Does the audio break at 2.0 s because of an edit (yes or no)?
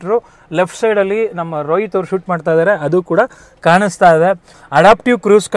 no